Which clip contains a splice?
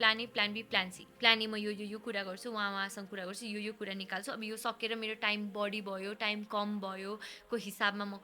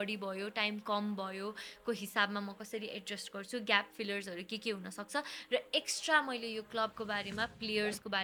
first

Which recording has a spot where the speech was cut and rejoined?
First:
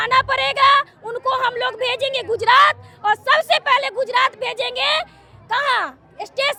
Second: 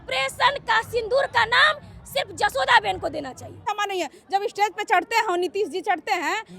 second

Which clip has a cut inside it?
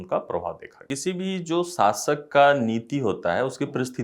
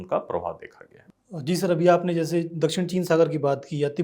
first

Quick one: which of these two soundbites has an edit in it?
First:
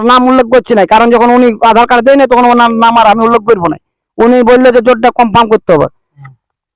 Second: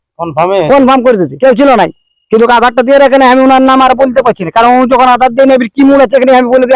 second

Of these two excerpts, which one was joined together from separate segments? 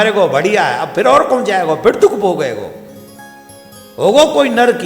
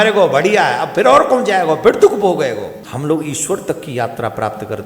second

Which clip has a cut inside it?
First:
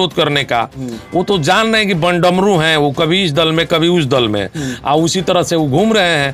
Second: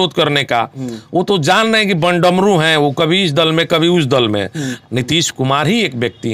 second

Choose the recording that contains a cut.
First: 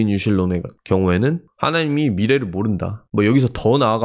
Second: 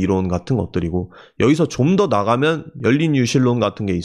first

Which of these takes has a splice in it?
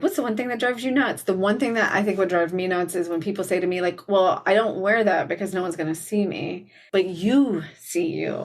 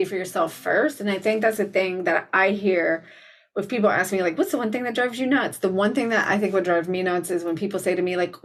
first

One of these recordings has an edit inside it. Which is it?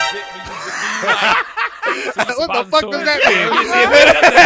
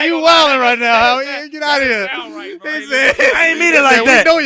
first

